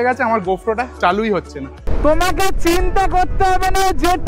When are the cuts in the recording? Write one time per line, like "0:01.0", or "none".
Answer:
0:00.9
0:01.8